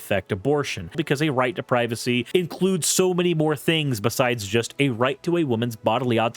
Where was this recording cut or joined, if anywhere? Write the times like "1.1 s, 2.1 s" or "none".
1.0 s, 2.3 s